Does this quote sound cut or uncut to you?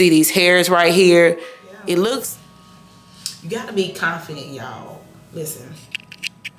cut